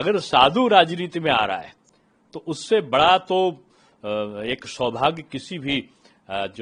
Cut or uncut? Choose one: uncut